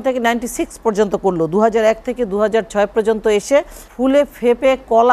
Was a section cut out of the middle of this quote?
yes; 1 cut; at 3.8 s

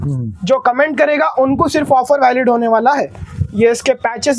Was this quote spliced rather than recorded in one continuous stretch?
no; 0 cuts

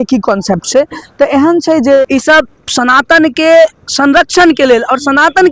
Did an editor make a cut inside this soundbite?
yes; 1 cut; at 2.0 s

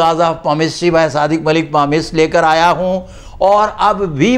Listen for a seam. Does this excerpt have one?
no; 0 cuts

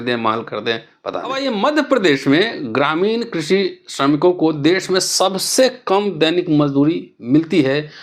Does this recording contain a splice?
yes; 1 cut; at 1.4 s

